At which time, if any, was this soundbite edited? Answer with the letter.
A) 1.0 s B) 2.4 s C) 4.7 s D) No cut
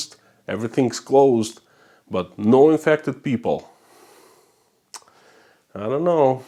D